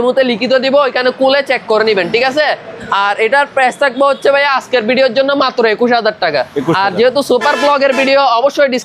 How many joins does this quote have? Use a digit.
0